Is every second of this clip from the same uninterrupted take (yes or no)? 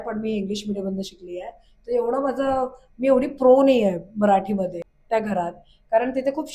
no